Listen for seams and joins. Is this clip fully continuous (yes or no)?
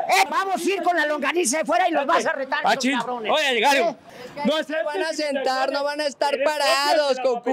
no